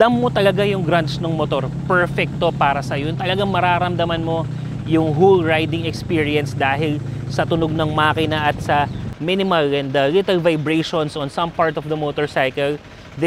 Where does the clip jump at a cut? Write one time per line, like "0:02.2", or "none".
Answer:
none

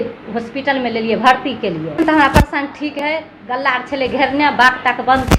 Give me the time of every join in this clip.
0:02.0

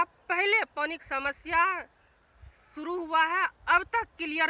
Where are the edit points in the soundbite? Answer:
none

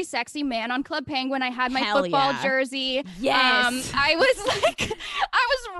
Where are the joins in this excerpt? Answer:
none

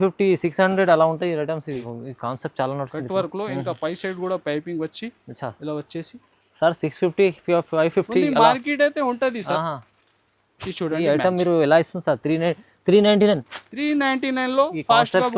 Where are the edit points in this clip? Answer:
0:01.8

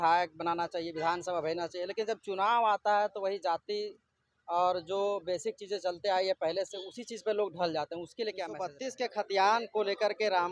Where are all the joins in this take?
0:08.8

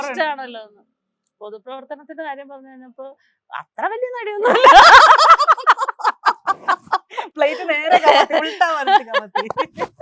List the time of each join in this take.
none

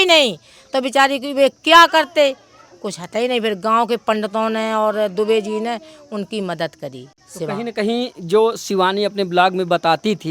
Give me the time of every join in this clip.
none

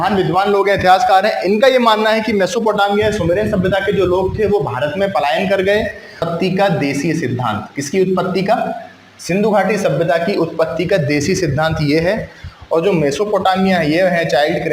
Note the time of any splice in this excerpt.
0:06.2

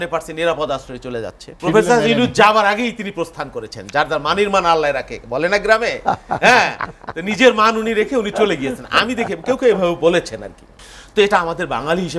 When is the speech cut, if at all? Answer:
0:01.4

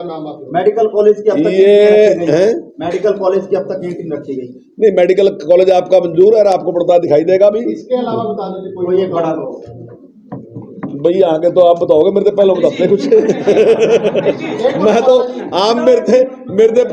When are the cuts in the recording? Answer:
none

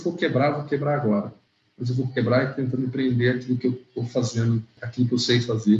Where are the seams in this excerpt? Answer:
0:04.8

